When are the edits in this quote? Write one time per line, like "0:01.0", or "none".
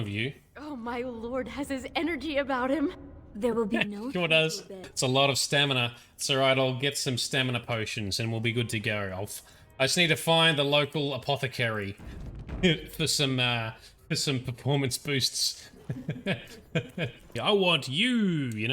0:04.8
0:17.4